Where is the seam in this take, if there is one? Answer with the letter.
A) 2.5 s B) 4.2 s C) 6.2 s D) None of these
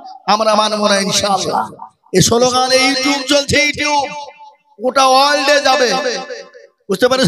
D